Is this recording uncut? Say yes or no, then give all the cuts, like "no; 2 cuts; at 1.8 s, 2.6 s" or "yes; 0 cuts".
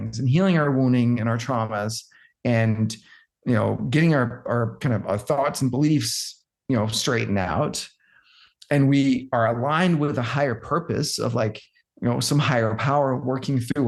yes; 0 cuts